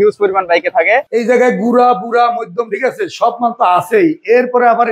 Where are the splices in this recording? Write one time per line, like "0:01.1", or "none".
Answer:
0:01.0